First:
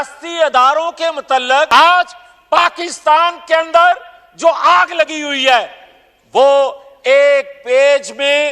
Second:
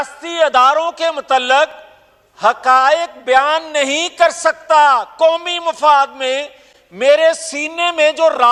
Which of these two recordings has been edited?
first; 1 cut; at 1.7 s

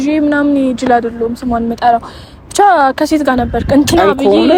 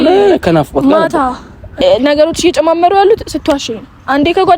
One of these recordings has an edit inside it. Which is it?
second; 1 cut; at 1.6 s

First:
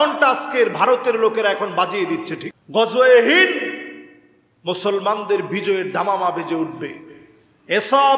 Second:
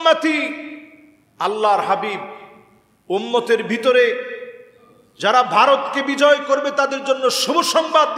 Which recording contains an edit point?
first; 1 cut; at 2.4 s

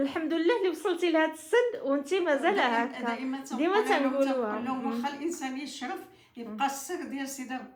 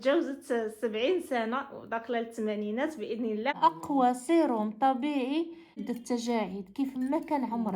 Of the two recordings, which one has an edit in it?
second; 2 cuts; at 3.6 s, 5.7 s

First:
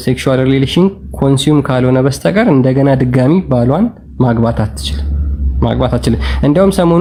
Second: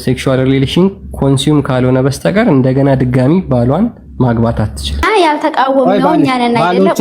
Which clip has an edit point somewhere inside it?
second; 1 cut; at 5.0 s

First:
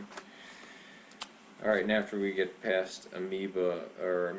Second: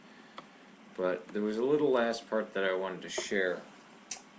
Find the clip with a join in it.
second; 1 cut; at 2.1 s

